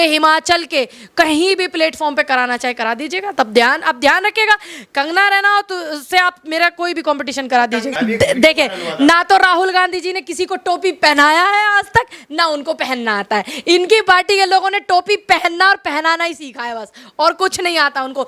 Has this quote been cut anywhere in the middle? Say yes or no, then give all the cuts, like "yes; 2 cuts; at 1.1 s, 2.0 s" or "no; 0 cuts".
yes; 1 cut; at 7.9 s